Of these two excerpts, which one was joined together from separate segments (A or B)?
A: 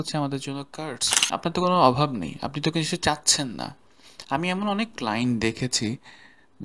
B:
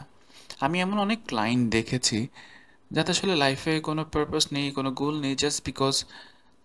A